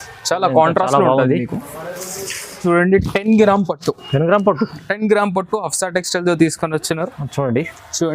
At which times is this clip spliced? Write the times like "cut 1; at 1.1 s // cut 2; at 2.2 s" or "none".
cut 1; at 2.6 s

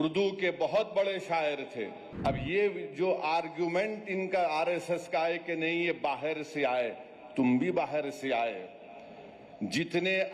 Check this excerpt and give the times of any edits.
cut 1; at 2.0 s

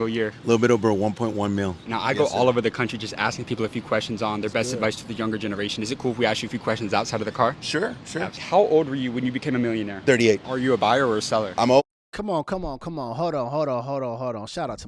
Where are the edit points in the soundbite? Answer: none

